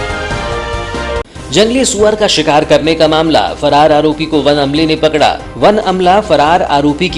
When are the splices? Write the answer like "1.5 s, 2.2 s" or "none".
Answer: 1.2 s